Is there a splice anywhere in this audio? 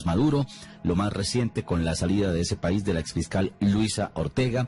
no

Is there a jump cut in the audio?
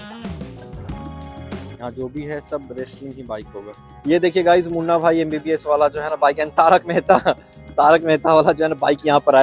no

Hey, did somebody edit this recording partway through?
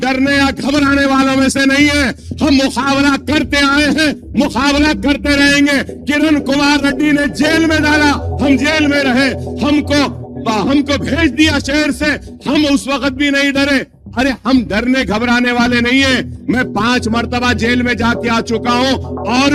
no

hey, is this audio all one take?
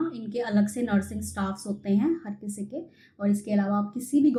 yes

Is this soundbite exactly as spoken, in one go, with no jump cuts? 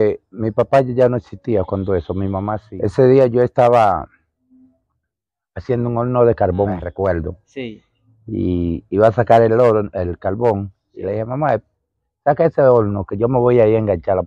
no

